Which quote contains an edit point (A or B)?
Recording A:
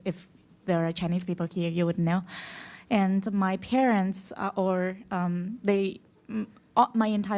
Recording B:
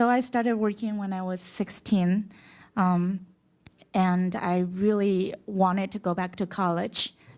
A